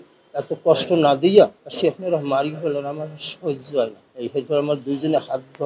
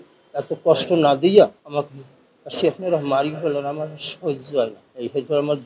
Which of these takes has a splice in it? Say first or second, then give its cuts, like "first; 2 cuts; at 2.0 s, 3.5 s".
first; 1 cut; at 1.6 s